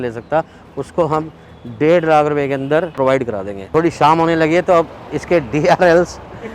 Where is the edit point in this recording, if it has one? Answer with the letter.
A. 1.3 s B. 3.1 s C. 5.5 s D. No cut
B